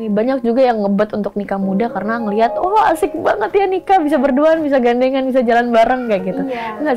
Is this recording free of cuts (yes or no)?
yes